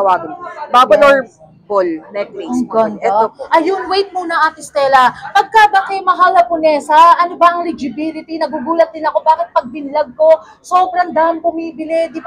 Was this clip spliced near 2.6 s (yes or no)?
no